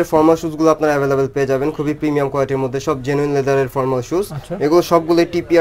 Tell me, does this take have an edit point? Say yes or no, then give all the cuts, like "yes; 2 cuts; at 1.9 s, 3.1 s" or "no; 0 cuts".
no; 0 cuts